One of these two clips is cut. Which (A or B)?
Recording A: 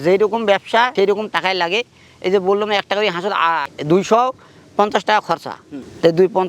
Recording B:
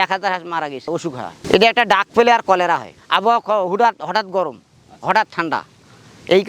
B